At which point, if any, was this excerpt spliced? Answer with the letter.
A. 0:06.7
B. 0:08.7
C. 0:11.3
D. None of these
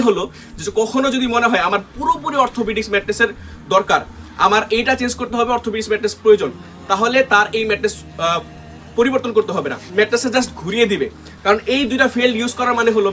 D